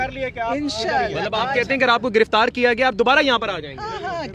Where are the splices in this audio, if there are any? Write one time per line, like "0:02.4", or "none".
none